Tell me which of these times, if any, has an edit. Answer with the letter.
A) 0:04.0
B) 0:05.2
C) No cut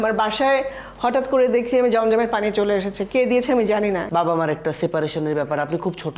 A